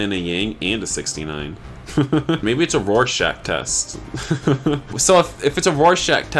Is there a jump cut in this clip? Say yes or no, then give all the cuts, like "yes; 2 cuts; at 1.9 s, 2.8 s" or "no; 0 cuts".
yes; 2 cuts; at 2.4 s, 4.9 s